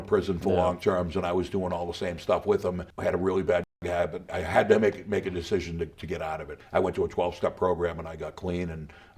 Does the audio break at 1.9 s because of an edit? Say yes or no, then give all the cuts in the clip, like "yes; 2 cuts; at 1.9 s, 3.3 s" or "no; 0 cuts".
no; 2 cuts; at 4.3 s, 6.5 s